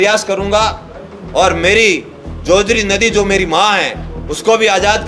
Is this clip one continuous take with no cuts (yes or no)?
yes